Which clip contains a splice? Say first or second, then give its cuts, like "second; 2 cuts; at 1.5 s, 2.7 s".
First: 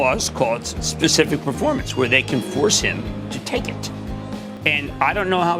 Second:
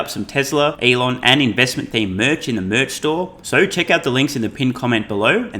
second; 2 cuts; at 0.8 s, 3.4 s